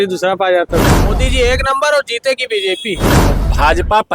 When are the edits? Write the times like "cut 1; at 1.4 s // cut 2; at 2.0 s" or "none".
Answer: cut 1; at 0.9 s // cut 2; at 3.1 s